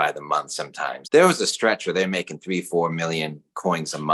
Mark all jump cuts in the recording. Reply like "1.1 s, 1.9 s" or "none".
1.0 s

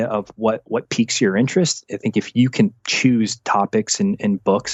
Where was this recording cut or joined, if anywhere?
none

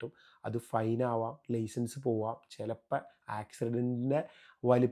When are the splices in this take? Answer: none

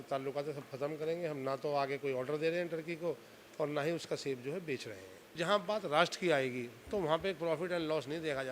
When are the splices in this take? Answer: 5.3 s

